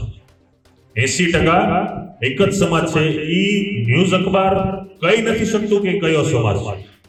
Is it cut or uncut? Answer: uncut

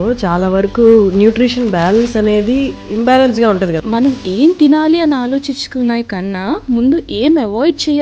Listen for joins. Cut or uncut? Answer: cut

